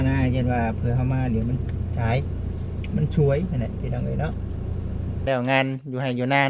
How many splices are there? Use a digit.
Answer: 1